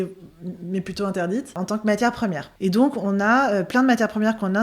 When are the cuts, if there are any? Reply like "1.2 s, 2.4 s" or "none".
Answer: 1.5 s, 2.5 s